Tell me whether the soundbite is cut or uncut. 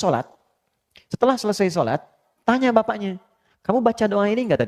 uncut